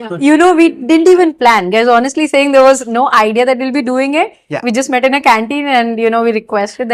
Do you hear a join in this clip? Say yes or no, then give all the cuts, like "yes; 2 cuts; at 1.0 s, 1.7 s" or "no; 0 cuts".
no; 0 cuts